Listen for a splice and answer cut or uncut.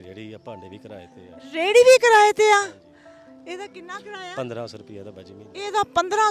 uncut